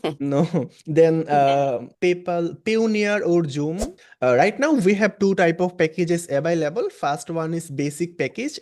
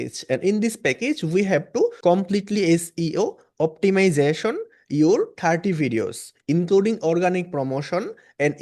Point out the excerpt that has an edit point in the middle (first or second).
first